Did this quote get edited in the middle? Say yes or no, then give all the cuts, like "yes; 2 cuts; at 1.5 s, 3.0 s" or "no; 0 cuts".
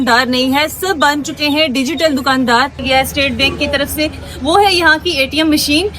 yes; 1 cut; at 2.8 s